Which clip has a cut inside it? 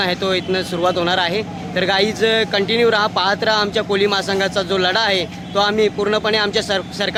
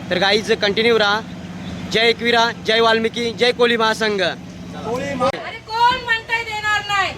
second; 1 cut; at 5.4 s

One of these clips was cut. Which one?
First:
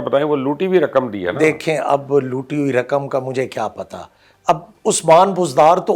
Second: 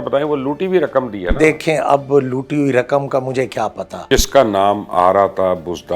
second; 1 cut; at 3.9 s

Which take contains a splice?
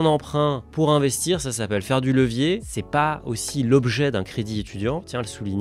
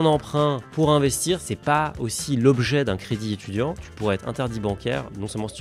second; 2 cuts; at 1.5 s, 3.8 s

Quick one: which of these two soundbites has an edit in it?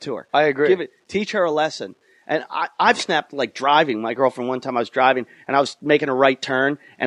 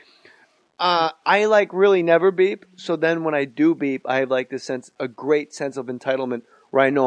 first; 1 cut; at 5.0 s

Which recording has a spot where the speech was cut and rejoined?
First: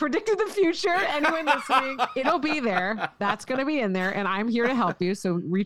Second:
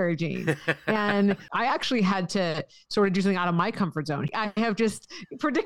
second; 2 cuts; at 1.5 s, 4.3 s

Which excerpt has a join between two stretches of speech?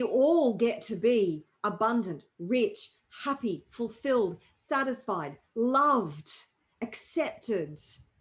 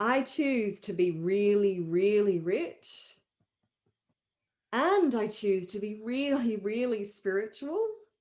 second; 1 cut; at 4.2 s

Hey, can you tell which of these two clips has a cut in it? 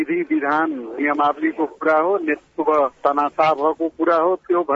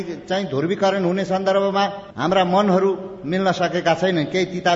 second; 1 cut; at 2.1 s

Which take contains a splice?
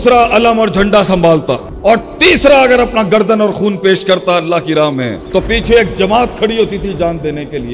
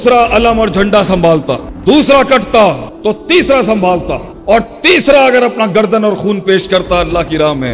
first; 1 cut; at 1.7 s

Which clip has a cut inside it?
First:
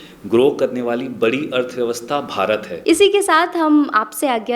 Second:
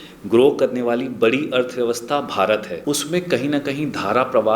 second; 1 cut; at 2.7 s

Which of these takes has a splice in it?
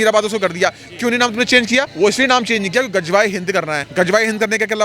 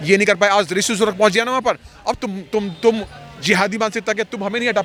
first; 2 cuts; at 1.9 s, 3.8 s

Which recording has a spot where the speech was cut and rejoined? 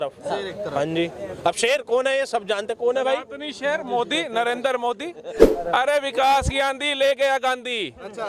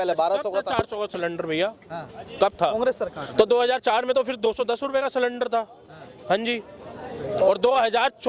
first; 1 cut; at 5.5 s

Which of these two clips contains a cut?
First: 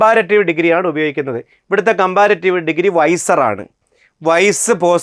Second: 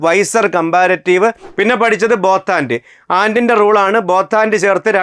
second; 1 cut; at 1.4 s

